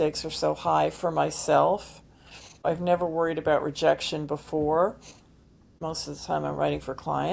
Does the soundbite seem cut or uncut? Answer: cut